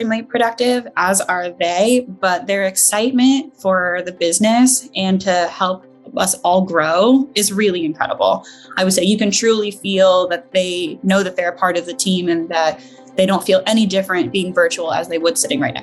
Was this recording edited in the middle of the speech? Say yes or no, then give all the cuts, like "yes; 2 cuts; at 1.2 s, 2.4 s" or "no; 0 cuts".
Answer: no; 0 cuts